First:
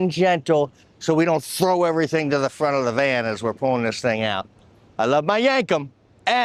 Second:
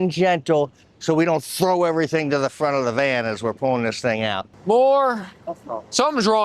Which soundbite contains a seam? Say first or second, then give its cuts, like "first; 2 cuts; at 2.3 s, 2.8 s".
second; 1 cut; at 4.5 s